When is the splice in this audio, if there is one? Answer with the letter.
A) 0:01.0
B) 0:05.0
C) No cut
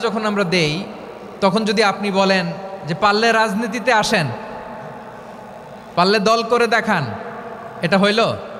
C